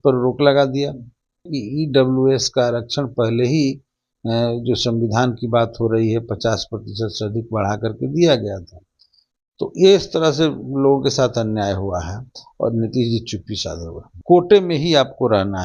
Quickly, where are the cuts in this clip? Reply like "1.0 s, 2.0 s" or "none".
1.6 s, 14.1 s